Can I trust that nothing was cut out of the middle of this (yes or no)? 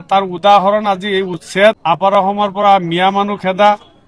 no